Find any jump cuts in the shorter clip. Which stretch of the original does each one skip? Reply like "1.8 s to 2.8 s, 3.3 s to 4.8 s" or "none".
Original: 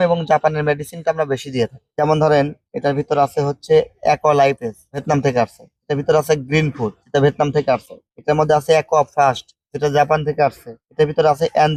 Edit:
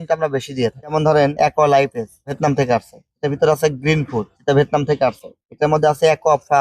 2.1 s to 3.8 s

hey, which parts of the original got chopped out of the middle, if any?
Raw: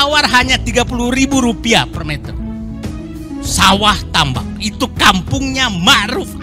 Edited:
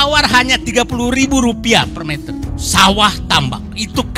2.3 s to 3.1 s

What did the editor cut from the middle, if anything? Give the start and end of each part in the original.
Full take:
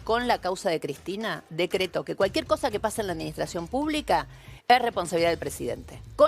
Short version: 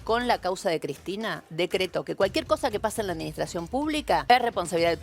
4.0 s to 4.4 s

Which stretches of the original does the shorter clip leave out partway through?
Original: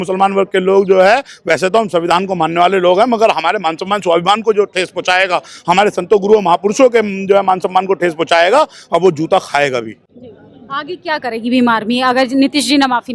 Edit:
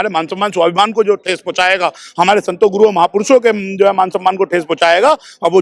none

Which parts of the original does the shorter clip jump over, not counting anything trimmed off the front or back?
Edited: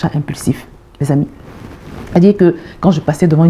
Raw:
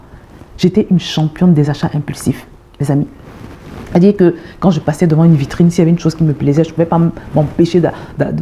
none

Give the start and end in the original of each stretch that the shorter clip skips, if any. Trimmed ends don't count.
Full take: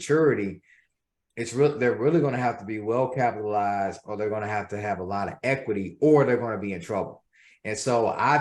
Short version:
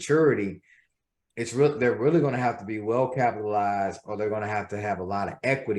none

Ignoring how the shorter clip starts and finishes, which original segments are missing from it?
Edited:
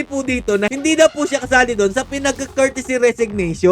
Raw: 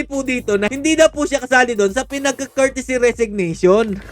none

